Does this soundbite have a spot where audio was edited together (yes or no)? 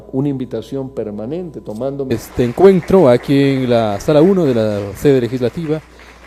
no